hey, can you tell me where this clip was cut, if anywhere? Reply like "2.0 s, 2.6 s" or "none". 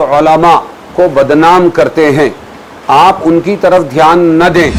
none